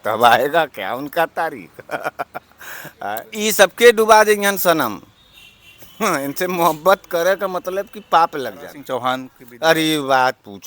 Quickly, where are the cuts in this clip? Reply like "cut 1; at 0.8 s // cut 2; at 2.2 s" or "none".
cut 1; at 3.2 s // cut 2; at 8.7 s